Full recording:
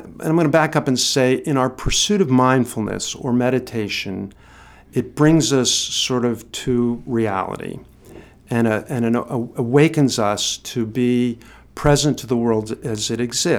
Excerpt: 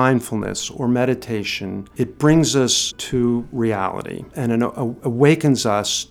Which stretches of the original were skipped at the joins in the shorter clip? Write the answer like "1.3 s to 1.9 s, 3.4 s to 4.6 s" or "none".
4.3 s to 4.8 s, 5.9 s to 6.5 s, 7.9 s to 8.9 s